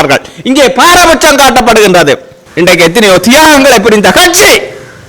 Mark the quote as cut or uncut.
cut